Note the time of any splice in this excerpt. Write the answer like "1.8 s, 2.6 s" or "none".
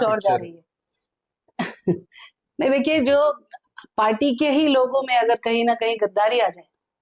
none